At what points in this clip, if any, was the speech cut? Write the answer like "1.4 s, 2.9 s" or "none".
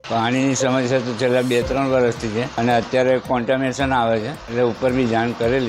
2.5 s, 4.4 s